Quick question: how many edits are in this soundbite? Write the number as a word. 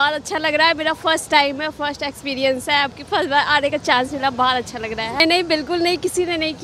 one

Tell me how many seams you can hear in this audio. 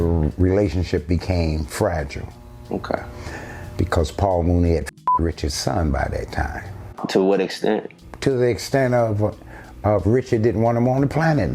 one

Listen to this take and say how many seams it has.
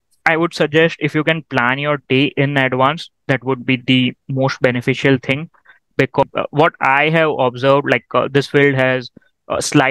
one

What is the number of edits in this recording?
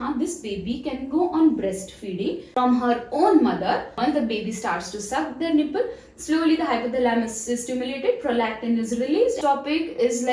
two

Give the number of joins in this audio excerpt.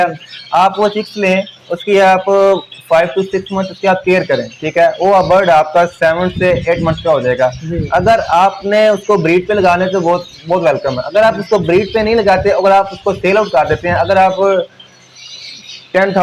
zero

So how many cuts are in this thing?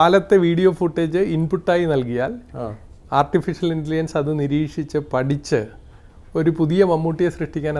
zero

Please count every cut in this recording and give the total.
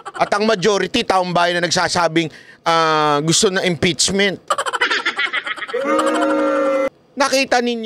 one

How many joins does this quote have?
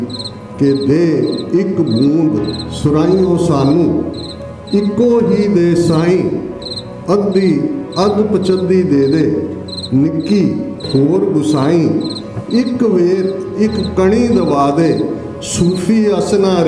zero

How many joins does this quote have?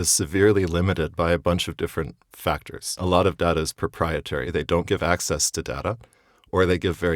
two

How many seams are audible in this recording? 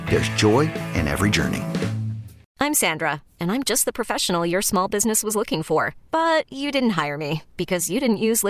one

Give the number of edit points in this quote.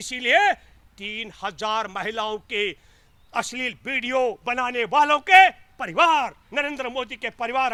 zero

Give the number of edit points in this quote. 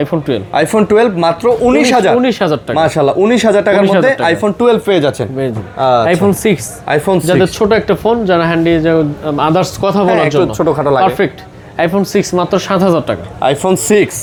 zero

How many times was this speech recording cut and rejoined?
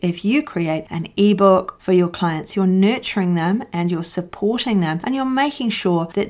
one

